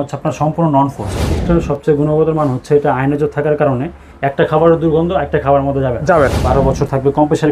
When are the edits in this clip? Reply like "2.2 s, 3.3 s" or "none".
1.4 s, 6.4 s